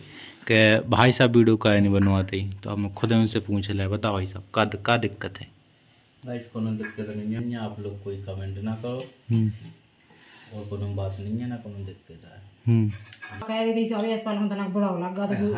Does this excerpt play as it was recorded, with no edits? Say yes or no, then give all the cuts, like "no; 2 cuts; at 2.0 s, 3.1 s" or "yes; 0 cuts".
no; 2 cuts; at 7.4 s, 13.4 s